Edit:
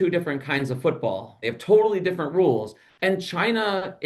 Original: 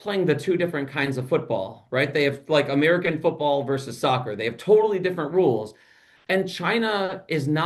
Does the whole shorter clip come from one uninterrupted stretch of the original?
no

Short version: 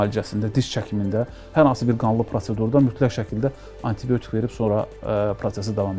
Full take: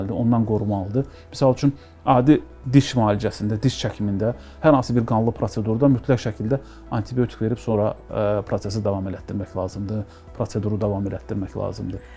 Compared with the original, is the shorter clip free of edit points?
yes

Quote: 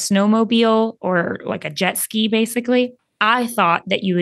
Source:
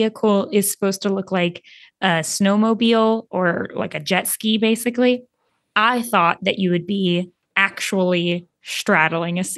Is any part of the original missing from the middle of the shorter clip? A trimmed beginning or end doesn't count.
yes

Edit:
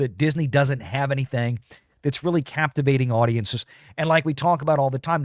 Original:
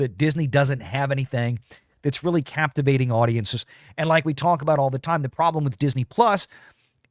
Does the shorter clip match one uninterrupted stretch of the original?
yes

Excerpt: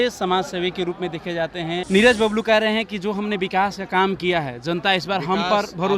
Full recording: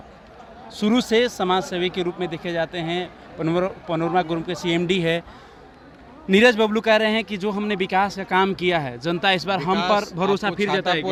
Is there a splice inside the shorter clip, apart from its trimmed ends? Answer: yes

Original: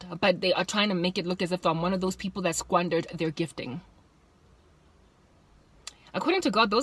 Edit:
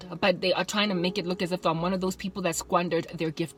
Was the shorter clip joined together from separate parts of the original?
no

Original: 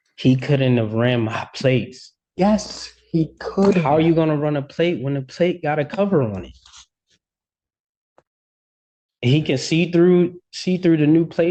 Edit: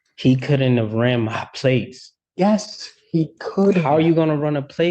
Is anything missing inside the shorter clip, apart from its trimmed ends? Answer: no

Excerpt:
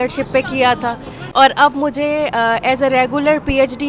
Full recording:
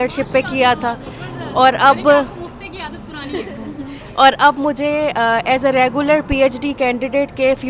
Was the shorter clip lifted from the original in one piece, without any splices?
no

